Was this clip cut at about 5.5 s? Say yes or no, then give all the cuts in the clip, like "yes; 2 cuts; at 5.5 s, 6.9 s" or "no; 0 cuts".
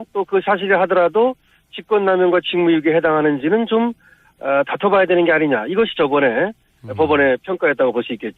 no; 1 cut; at 2.8 s